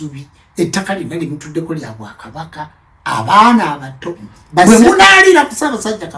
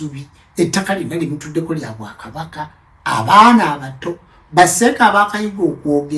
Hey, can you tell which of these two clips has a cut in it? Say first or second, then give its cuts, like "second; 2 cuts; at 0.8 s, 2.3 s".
first; 1 cut; at 4.7 s